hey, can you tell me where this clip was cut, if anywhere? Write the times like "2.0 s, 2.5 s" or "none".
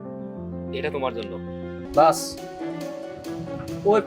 1.8 s